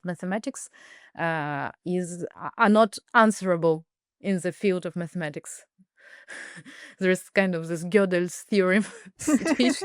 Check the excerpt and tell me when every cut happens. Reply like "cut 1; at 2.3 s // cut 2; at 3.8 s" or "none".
none